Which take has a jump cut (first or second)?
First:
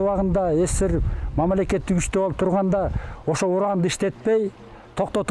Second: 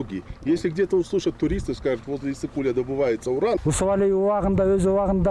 second